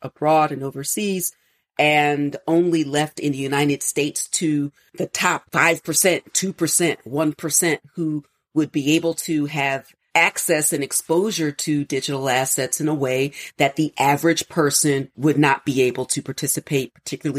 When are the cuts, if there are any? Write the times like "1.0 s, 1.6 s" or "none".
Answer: none